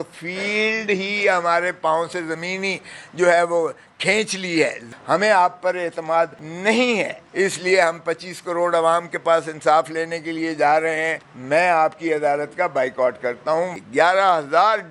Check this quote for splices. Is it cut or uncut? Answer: cut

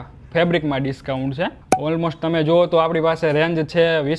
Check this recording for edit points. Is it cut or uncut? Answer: cut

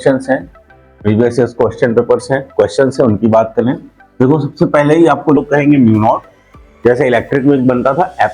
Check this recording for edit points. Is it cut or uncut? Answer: cut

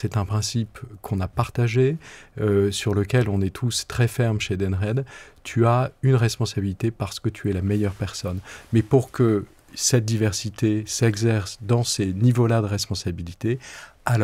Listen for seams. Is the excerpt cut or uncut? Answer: uncut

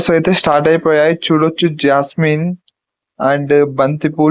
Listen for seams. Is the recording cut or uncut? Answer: uncut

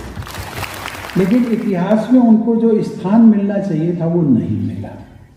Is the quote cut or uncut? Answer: cut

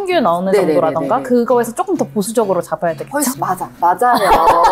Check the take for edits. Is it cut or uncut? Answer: uncut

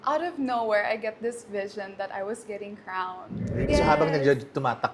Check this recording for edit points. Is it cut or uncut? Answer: cut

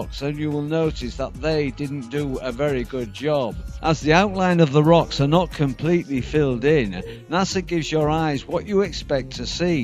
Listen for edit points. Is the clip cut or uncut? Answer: uncut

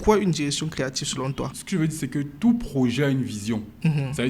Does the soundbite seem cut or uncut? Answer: cut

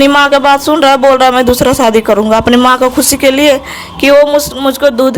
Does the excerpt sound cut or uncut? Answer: uncut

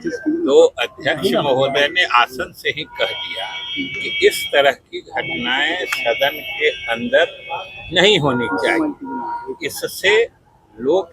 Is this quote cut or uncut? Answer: uncut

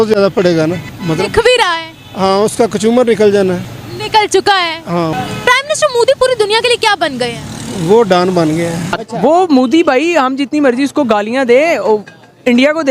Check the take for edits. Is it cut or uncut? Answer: cut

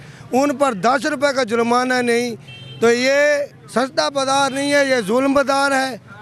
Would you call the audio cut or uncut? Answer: uncut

